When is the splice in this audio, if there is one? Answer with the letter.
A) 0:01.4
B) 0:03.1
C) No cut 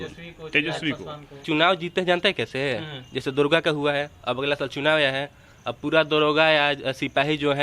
A